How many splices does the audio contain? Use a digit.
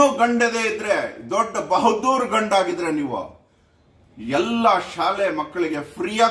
0